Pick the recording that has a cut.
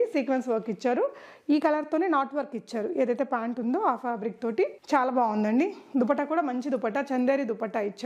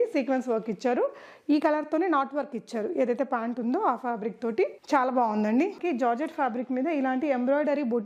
second; 1 cut; at 5.8 s

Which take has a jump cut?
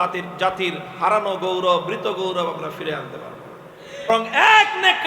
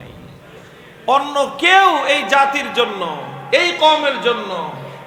first; 1 cut; at 4.1 s

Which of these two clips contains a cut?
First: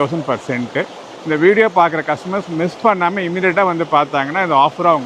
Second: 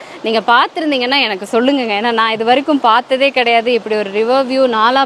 first; 1 cut; at 1.0 s

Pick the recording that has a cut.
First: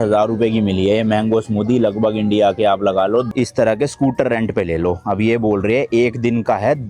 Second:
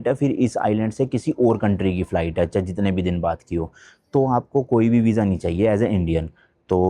first; 1 cut; at 3.3 s

